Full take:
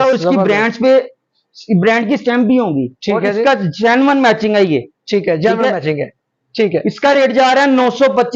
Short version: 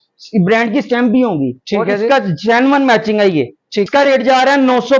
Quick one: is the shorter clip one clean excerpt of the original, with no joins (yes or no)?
no